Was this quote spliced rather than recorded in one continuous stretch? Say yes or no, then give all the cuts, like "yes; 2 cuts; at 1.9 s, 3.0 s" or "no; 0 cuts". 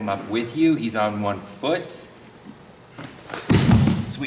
no; 0 cuts